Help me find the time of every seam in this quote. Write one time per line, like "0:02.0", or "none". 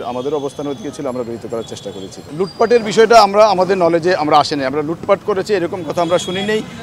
0:02.2